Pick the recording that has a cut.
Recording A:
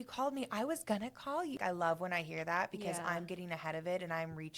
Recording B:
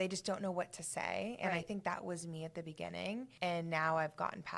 A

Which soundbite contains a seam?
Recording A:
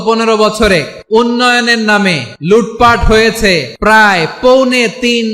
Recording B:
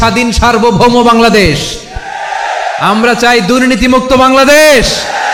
A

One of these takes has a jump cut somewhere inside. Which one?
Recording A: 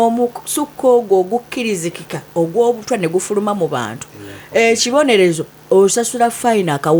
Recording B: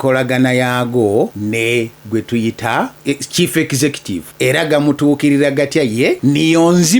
B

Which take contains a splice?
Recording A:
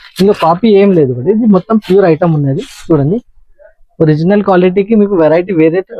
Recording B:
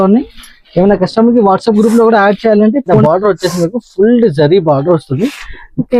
B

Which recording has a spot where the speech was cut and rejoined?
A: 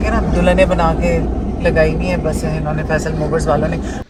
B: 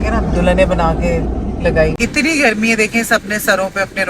B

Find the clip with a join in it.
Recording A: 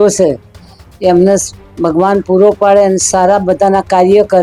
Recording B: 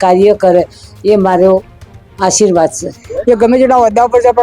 B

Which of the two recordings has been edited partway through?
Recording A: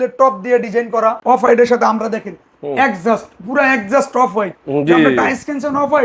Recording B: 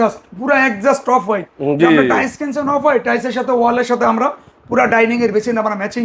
A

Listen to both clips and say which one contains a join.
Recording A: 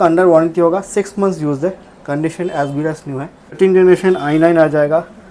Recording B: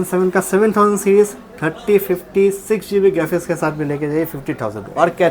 A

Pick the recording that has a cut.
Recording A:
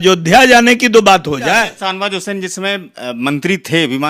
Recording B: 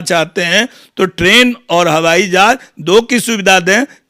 A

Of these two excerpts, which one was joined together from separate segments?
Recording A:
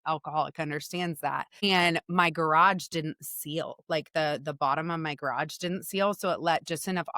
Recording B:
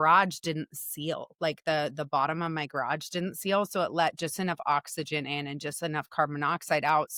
A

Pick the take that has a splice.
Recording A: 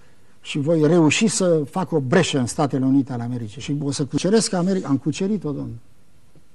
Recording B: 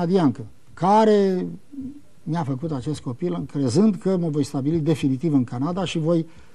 A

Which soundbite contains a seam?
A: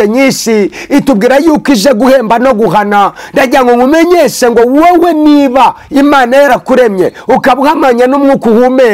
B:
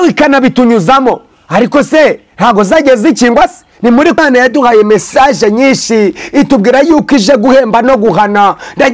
B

